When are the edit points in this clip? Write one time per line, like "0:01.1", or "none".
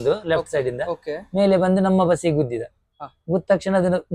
none

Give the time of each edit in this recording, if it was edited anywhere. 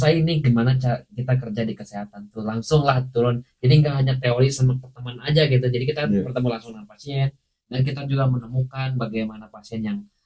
none

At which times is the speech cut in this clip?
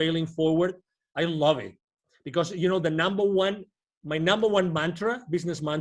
none

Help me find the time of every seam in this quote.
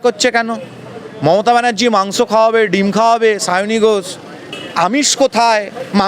0:04.6

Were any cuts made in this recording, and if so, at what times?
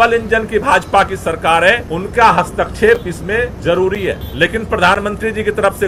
0:01.9
0:03.6
0:04.3

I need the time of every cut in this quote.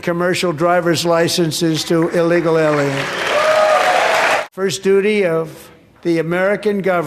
0:04.4

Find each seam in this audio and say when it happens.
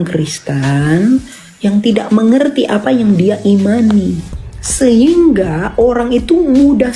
none

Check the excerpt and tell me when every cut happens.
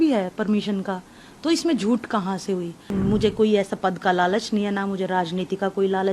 0:02.8

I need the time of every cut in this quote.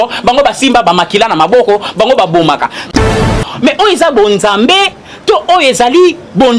0:03.0

